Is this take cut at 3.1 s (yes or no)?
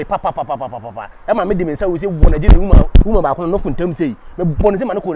no